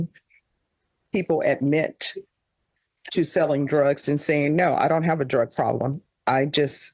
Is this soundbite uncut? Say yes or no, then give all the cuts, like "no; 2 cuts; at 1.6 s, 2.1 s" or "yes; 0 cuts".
yes; 0 cuts